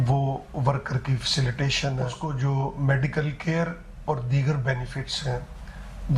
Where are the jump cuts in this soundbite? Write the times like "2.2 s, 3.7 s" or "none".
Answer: 2.1 s